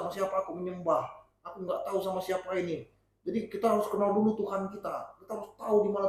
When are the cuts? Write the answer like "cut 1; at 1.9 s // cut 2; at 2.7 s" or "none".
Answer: none